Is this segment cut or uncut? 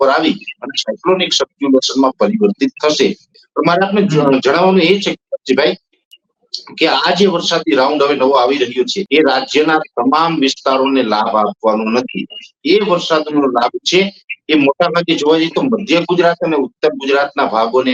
uncut